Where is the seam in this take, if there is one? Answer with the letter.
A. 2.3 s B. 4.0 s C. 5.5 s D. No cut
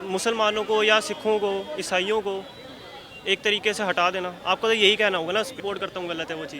C